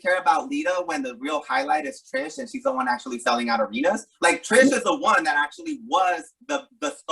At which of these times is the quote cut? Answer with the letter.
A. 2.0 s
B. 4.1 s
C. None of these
C